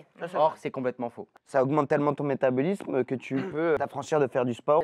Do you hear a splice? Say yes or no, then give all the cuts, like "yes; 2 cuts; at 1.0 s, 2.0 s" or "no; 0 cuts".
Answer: yes; 2 cuts; at 1.2 s, 3.8 s